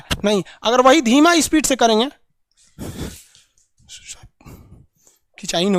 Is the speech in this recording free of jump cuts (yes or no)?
yes